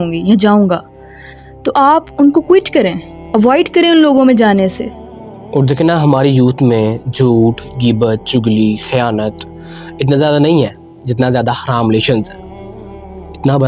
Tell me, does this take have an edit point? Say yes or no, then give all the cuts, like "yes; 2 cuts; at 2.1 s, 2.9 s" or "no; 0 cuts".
no; 0 cuts